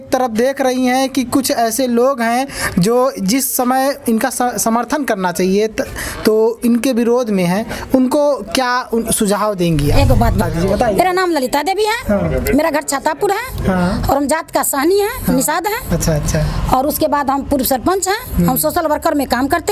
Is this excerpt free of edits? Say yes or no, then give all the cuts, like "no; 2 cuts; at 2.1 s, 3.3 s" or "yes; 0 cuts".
no; 1 cut; at 10.5 s